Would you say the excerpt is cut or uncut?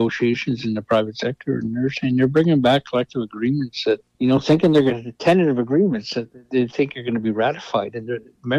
cut